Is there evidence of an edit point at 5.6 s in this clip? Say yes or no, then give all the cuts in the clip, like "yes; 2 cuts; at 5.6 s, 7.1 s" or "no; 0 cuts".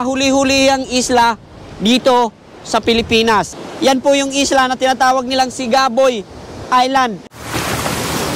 no; 2 cuts; at 3.6 s, 7.2 s